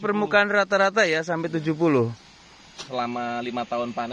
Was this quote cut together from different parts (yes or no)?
yes